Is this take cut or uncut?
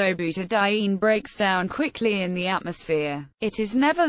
cut